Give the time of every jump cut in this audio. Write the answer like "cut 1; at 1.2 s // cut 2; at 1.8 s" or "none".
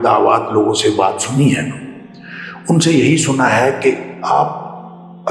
none